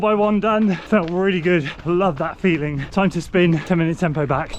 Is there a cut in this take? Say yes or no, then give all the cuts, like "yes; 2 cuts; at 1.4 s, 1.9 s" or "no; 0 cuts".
yes; 3 cuts; at 0.8 s, 2.8 s, 3.6 s